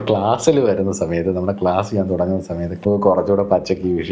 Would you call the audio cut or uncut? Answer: cut